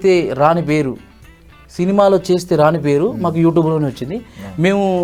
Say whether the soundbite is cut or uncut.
uncut